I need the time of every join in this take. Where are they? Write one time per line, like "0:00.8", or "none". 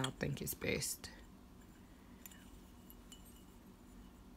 none